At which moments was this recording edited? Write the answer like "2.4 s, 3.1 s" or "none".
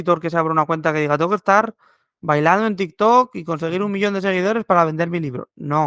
none